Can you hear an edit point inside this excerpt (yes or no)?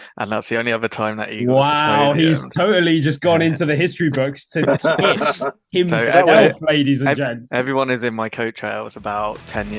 no